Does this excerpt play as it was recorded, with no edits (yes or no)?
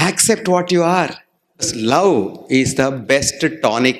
no